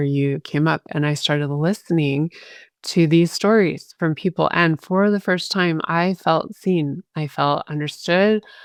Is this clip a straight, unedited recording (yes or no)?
yes